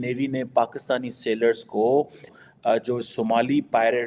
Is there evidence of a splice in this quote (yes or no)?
yes